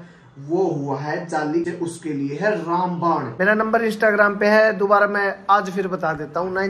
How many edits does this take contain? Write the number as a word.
two